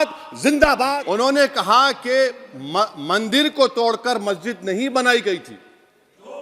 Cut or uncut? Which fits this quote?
cut